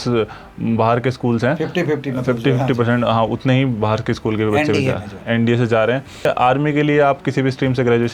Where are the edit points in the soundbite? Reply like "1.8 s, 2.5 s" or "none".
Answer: 6.2 s

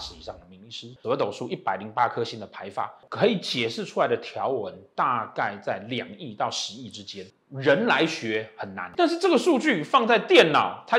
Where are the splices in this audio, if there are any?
0.9 s, 3.0 s, 7.3 s, 8.8 s

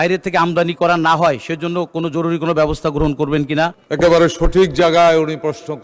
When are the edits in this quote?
3.8 s

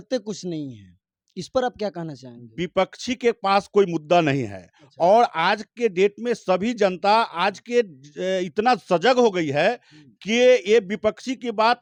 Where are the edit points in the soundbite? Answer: none

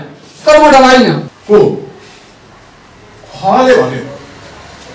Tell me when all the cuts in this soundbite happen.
1.3 s

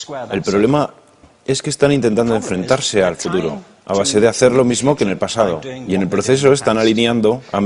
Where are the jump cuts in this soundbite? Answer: none

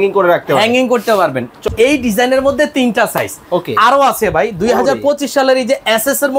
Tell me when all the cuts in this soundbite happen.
1.6 s

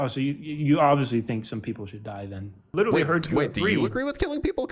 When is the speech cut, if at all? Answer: 2.6 s

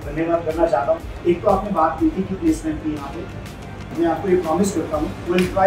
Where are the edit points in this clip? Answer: 1.0 s, 3.8 s

